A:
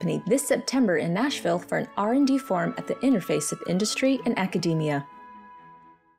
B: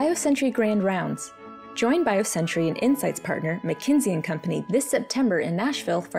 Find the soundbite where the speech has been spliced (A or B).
A